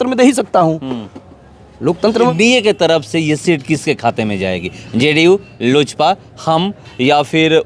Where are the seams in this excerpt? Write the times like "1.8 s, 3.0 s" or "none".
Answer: 2.3 s

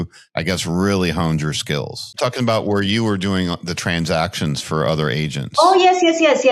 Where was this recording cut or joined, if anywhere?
2.0 s

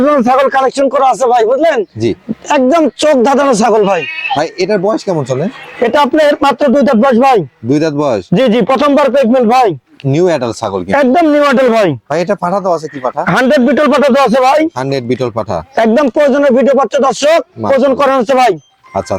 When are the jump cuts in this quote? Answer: none

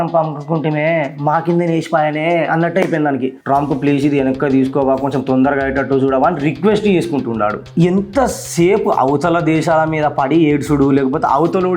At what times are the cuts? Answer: 3.4 s, 7.6 s

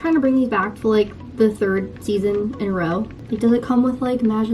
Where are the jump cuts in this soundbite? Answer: 3.2 s

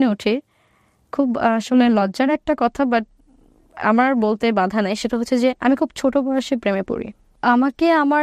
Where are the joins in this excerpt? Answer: none

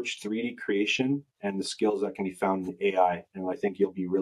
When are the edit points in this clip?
3.3 s

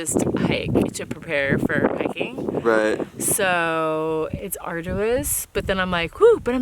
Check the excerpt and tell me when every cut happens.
4.3 s

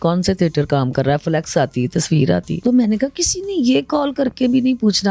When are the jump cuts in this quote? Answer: 2.5 s

